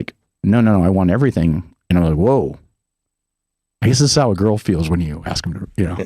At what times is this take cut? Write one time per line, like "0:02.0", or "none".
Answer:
none